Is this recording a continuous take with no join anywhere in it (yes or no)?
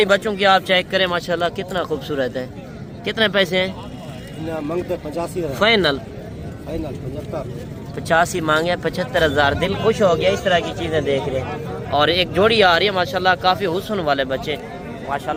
yes